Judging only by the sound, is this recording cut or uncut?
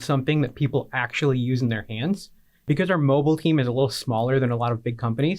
cut